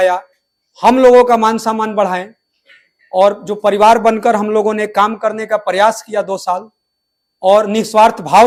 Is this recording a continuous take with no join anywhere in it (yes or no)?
yes